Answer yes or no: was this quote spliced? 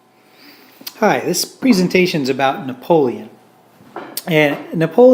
no